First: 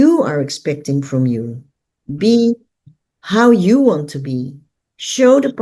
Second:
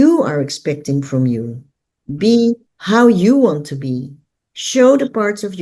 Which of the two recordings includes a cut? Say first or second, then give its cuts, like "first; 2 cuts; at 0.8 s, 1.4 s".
second; 1 cut; at 2.7 s